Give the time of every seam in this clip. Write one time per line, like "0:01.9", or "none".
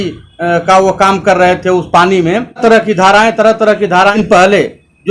0:02.6
0:04.1